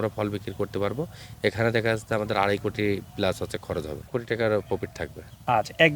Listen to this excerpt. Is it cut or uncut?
cut